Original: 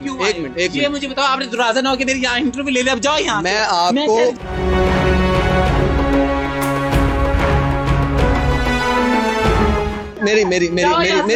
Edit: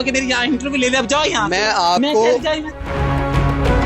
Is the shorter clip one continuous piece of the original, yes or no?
no